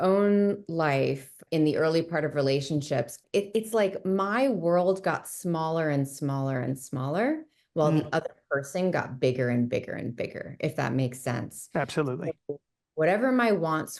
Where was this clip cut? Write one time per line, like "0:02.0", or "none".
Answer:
0:01.4
0:03.2